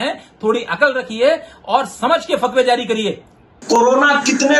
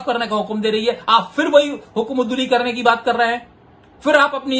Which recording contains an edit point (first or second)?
first